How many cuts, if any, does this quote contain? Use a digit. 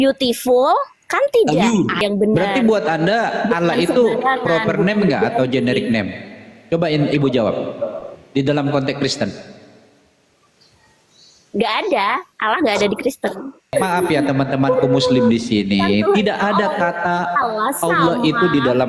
2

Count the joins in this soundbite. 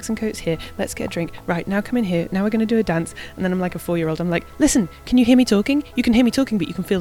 0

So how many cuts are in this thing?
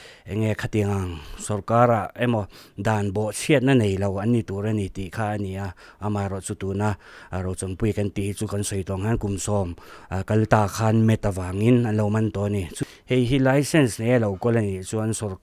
1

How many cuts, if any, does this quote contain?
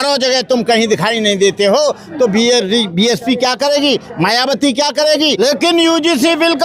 1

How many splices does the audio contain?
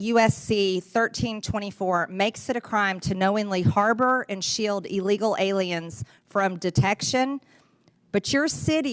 0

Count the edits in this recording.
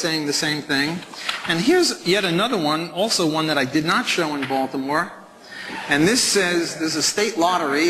1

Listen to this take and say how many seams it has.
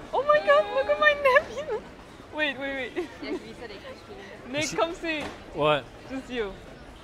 0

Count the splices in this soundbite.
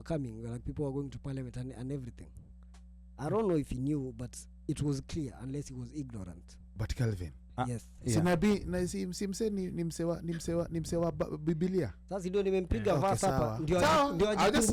0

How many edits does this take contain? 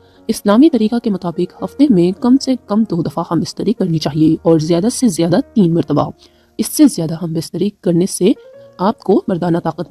0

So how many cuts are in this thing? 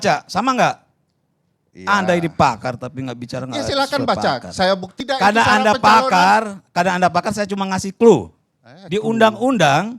1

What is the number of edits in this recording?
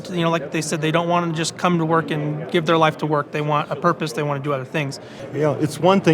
1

